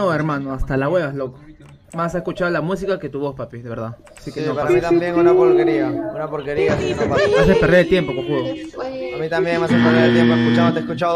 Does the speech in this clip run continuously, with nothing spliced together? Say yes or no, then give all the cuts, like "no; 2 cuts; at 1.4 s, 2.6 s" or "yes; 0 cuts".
yes; 0 cuts